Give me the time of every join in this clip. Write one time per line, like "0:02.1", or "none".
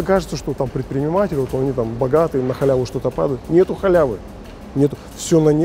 none